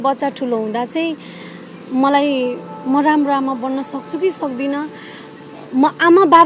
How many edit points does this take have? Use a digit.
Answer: 0